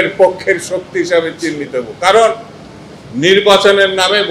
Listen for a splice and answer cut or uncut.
uncut